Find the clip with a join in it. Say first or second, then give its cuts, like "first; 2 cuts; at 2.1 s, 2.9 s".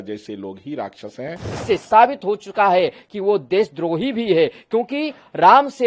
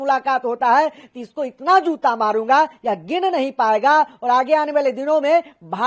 first; 1 cut; at 1.5 s